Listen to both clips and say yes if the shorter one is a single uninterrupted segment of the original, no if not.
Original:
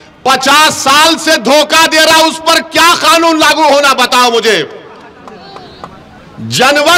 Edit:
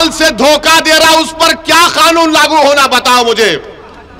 yes